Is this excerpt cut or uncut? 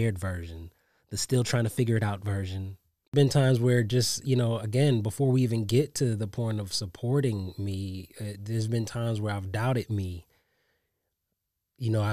cut